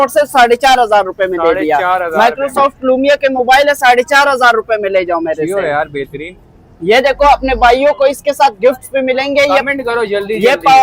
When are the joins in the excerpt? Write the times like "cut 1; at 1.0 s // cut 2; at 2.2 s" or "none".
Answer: none